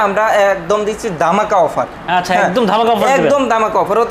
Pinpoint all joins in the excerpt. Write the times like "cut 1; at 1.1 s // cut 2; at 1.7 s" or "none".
none